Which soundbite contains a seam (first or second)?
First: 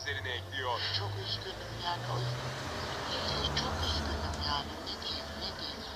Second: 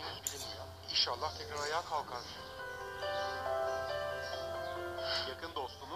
first